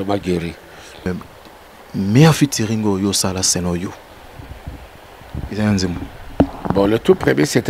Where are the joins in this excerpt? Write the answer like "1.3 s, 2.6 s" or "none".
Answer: 1.1 s